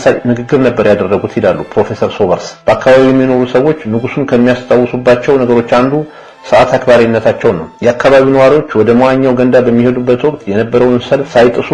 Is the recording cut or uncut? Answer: cut